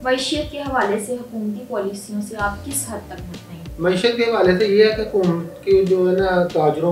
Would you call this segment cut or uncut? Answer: uncut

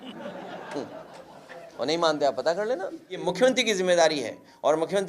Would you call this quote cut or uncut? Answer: cut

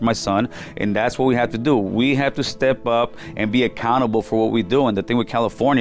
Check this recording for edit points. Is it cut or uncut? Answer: uncut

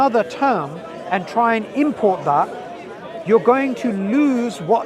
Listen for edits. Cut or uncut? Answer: uncut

